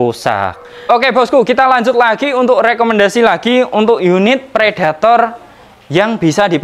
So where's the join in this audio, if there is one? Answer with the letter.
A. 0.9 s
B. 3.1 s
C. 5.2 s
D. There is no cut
A